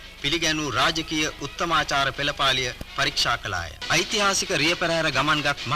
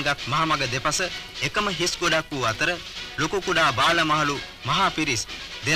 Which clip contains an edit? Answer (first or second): first